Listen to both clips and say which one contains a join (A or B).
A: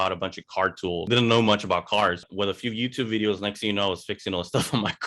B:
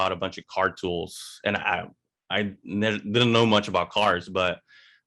A